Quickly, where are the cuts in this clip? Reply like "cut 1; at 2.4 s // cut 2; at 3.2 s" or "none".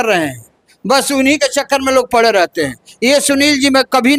none